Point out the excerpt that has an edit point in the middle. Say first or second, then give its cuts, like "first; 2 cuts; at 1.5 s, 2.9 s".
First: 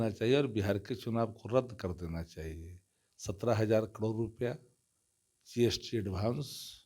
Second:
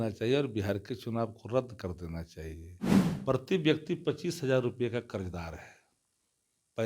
second; 1 cut; at 2.8 s